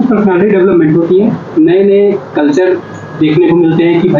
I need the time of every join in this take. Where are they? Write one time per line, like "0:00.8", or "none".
none